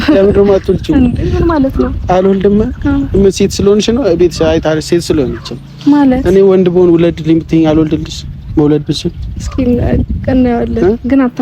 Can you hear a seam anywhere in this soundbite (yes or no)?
no